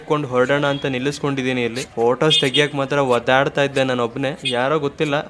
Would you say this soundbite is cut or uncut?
uncut